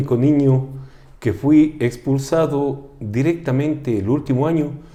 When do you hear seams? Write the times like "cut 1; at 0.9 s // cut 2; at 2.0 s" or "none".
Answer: none